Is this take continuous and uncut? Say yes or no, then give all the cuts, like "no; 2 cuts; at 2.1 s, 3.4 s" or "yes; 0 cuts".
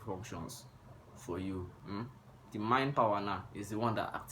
no; 1 cut; at 1.8 s